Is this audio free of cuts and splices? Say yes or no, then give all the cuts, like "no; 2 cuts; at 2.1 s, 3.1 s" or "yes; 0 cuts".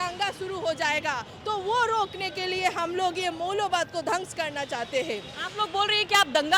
yes; 0 cuts